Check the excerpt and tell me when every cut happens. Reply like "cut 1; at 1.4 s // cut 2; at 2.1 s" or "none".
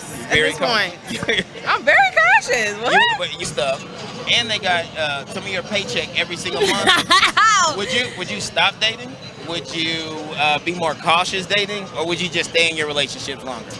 cut 1; at 3.4 s